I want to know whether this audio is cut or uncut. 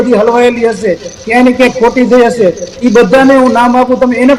uncut